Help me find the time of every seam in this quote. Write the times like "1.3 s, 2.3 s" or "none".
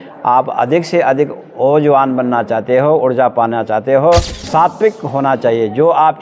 4.4 s